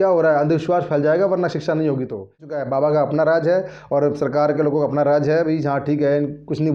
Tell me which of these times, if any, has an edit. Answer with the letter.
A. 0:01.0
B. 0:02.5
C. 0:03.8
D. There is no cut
B